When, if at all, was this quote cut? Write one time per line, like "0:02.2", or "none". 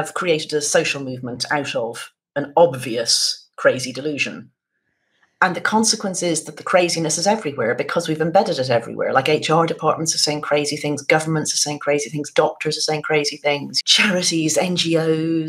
0:13.7